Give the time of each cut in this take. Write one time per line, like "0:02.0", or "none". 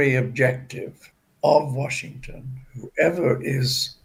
none